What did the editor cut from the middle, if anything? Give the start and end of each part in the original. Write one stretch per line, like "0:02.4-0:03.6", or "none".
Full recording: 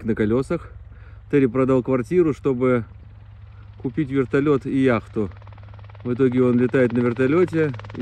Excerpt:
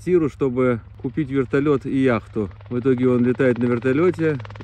0:03.0-0:03.7
0:05.4-0:06.0